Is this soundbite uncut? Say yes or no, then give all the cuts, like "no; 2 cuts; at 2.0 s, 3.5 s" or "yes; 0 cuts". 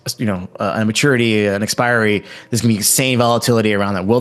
yes; 0 cuts